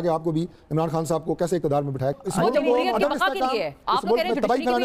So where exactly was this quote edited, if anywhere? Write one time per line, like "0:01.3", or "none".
0:02.1